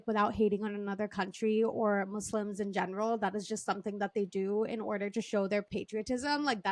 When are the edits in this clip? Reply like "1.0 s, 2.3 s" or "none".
5.7 s